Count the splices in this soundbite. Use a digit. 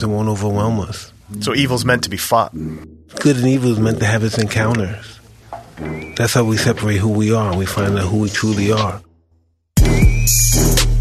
3